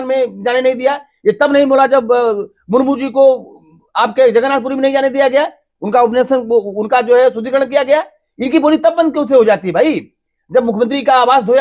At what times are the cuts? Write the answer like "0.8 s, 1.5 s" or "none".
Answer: none